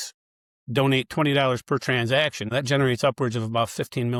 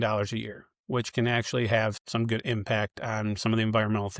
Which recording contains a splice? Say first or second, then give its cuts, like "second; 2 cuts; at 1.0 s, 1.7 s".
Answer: second; 1 cut; at 2.0 s